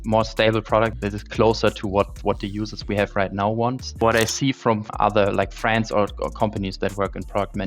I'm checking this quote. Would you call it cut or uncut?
cut